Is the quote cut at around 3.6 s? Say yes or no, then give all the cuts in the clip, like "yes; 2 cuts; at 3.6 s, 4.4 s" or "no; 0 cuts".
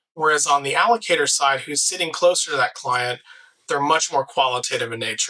no; 0 cuts